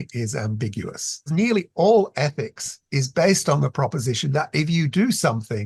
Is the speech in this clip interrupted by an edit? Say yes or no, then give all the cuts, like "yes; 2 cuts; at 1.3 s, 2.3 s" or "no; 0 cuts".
yes; 1 cut; at 1.3 s